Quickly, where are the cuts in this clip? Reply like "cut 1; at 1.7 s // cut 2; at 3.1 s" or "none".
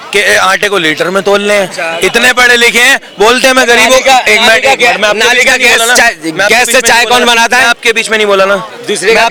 none